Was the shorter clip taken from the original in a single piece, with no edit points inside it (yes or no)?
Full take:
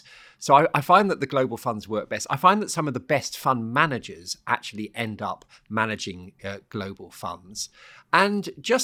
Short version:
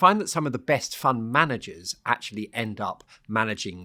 yes